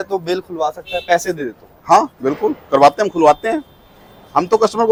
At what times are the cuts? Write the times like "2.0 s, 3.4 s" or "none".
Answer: none

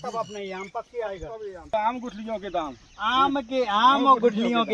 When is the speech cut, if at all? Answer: 1.7 s

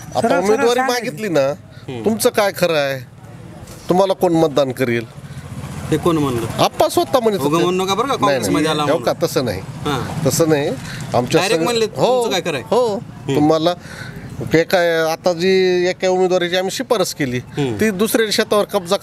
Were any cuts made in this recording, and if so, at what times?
none

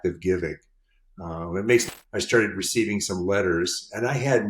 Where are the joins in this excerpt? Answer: 1.9 s

